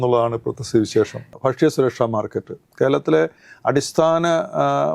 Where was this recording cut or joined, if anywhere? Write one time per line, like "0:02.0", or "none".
0:01.2